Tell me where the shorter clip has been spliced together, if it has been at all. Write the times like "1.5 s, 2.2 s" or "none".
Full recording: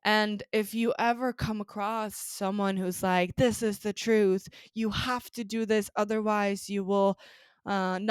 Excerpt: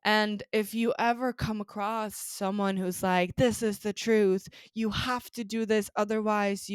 none